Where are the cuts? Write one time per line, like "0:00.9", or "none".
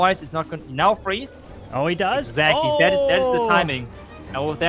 none